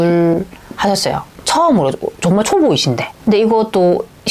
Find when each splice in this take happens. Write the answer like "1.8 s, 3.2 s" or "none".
3.1 s